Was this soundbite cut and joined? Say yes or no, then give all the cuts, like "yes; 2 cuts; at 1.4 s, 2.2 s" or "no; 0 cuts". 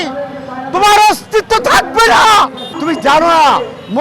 yes; 1 cut; at 2.7 s